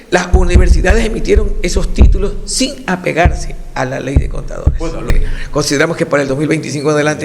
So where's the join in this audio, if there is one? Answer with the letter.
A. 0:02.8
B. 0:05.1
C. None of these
B